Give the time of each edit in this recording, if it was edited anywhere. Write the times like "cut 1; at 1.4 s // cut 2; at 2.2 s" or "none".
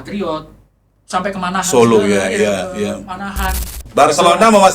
cut 1; at 3.7 s